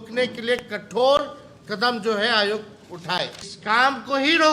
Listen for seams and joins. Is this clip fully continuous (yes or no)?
no